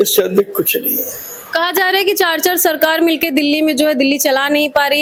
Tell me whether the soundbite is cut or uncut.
uncut